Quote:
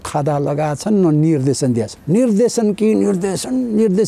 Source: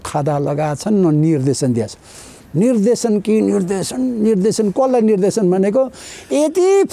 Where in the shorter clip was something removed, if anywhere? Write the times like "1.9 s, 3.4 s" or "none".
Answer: 2.0 s